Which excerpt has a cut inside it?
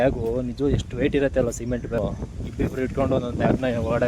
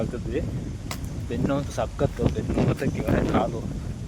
first; 1 cut; at 2.0 s

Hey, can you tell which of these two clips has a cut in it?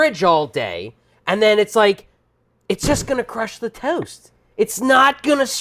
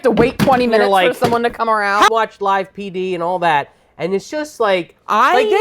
second; 1 cut; at 2.1 s

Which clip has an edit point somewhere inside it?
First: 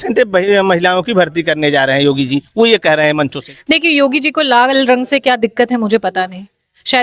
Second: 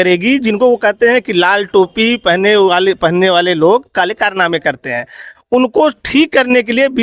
first; 1 cut; at 3.5 s

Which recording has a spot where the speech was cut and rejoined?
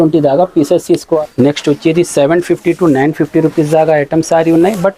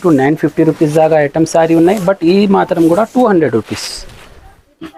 first; 1 cut; at 1.2 s

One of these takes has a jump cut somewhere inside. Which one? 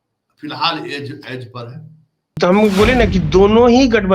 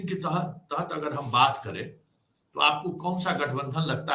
first; 1 cut; at 2.3 s

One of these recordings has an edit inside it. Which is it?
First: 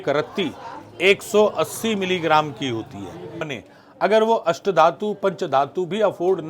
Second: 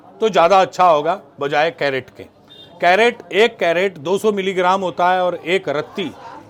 first; 1 cut; at 3.5 s

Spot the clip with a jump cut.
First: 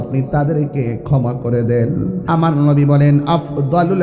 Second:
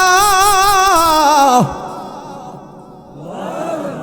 first; 1 cut; at 2.2 s

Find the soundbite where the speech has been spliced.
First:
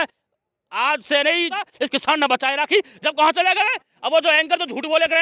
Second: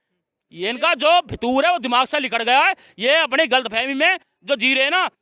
first; 1 cut; at 1.5 s

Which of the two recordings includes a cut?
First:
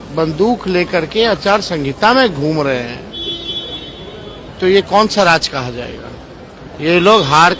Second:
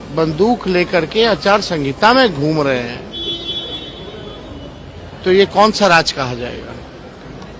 first; 2 cuts; at 4.5 s, 6.6 s

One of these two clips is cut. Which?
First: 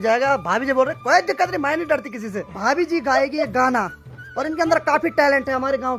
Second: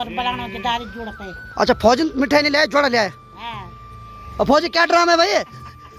first; 1 cut; at 2.5 s

